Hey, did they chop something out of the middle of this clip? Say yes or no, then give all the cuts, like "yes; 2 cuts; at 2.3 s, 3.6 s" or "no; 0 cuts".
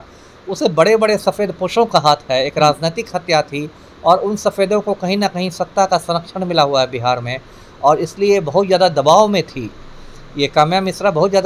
no; 0 cuts